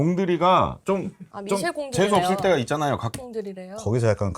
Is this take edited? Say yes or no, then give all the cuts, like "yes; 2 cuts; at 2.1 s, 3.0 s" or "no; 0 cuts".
yes; 1 cut; at 3.1 s